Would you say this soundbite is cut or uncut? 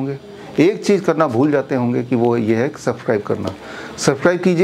uncut